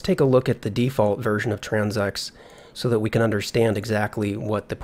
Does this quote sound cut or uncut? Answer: uncut